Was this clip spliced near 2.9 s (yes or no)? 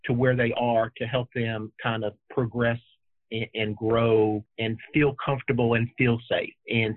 no